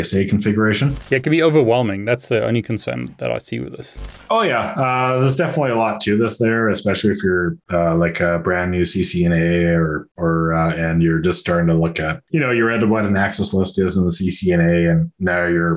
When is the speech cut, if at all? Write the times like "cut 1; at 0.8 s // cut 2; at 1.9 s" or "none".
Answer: cut 1; at 1.0 s